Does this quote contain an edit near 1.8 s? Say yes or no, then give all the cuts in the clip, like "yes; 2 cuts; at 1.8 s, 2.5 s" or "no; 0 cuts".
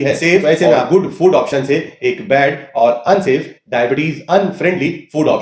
no; 0 cuts